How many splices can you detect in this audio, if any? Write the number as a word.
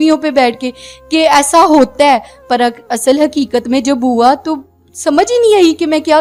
zero